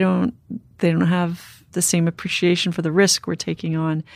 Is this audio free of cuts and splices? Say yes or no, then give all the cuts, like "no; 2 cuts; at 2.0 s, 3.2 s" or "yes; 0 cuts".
yes; 0 cuts